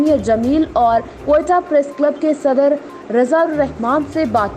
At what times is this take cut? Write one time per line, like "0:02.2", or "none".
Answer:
none